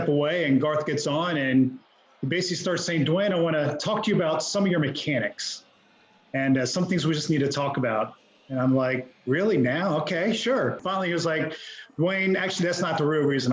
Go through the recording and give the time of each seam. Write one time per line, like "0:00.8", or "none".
0:10.8